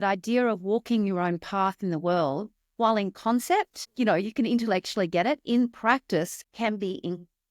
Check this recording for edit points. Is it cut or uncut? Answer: cut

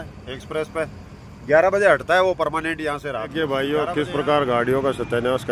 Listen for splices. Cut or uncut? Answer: cut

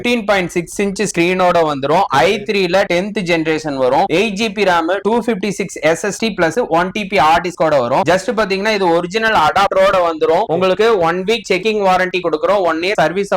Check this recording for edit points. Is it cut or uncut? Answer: uncut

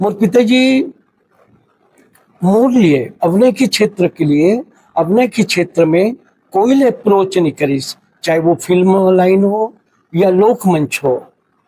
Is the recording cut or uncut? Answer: uncut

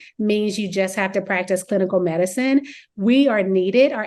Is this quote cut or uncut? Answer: uncut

